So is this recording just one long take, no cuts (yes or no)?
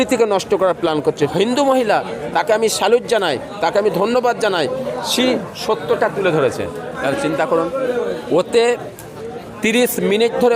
no